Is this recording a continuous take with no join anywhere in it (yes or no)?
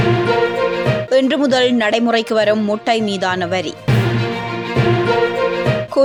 yes